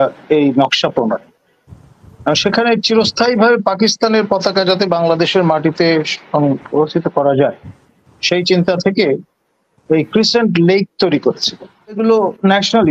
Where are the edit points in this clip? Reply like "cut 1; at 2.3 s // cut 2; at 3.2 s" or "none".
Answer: cut 1; at 12.0 s